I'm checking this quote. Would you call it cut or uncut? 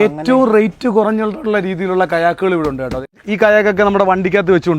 cut